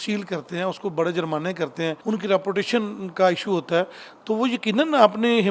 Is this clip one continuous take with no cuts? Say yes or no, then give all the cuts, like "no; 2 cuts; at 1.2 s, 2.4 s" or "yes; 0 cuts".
no; 1 cut; at 2.0 s